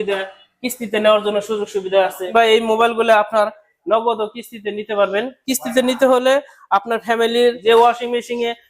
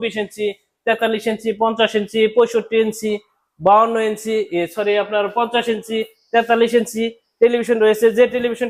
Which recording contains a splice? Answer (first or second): first